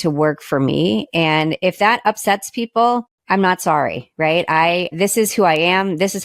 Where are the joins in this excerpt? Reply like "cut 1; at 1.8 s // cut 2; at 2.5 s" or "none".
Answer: cut 1; at 3.1 s // cut 2; at 4.9 s